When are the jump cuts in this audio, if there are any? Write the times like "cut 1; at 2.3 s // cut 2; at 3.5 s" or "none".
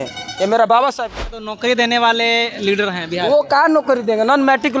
cut 1; at 1.3 s